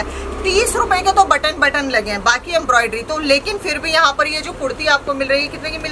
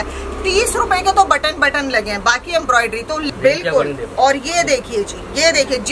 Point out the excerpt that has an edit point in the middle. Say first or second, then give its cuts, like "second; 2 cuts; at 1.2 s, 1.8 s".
second; 1 cut; at 3.2 s